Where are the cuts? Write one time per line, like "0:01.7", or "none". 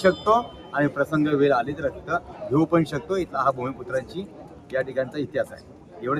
none